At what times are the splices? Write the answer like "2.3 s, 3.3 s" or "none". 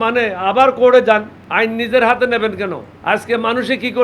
1.4 s, 2.9 s